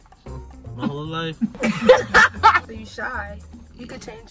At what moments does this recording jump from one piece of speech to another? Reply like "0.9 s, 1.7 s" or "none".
2.8 s